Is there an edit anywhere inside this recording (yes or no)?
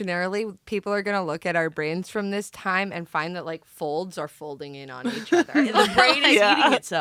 no